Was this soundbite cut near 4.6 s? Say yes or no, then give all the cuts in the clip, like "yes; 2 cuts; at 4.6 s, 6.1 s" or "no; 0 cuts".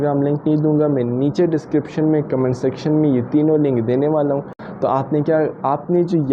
yes; 1 cut; at 4.6 s